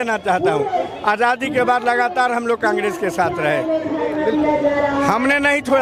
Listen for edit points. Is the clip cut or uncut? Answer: uncut